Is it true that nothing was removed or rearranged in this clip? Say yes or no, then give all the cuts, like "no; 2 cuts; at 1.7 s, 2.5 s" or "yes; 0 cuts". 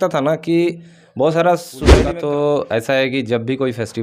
no; 1 cut; at 1.9 s